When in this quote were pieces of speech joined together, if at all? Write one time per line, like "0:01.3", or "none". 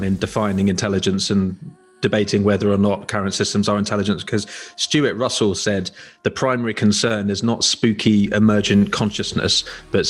none